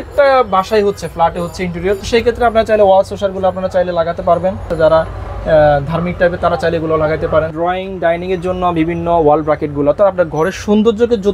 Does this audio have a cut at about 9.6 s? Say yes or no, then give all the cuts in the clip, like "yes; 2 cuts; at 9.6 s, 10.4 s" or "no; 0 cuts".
no; 3 cuts; at 2.0 s, 4.7 s, 7.5 s